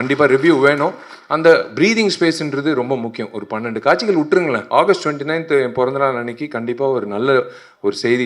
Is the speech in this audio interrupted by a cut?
yes; 1 cut; at 4.6 s

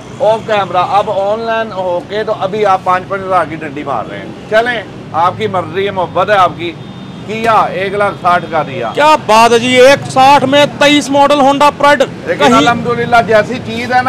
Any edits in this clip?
no; 0 cuts

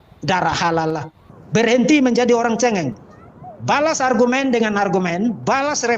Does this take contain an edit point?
yes; 1 cut; at 1.1 s

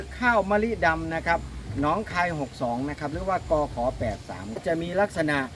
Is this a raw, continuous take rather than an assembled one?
no; 1 cut; at 4.6 s

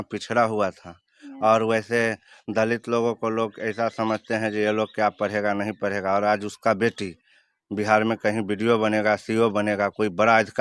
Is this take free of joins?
yes; 0 cuts

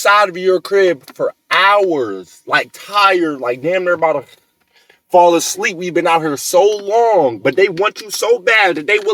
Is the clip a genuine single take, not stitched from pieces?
yes; 0 cuts

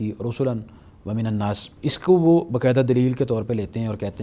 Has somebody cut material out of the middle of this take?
yes; 1 cut; at 1.7 s

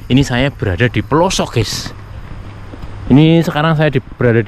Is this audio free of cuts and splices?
yes; 0 cuts

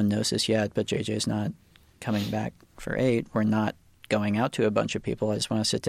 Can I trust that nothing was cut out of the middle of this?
yes; 0 cuts

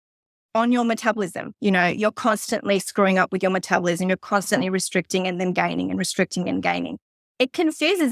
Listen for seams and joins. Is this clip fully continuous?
yes; 0 cuts

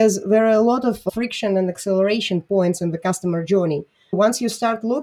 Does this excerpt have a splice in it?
yes; 2 cuts; at 1.1 s, 4.1 s

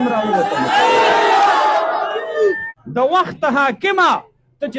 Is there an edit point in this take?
yes; 1 cut; at 2.7 s

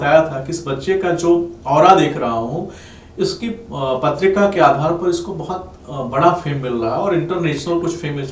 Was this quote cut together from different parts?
no; 0 cuts

